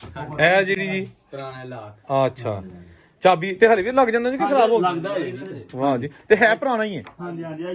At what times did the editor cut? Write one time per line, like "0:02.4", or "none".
none